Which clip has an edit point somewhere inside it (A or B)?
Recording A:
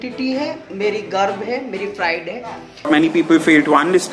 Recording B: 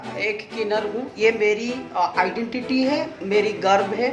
A